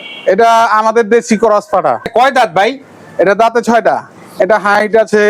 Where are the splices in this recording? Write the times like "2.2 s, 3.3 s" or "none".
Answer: 2.1 s, 4.2 s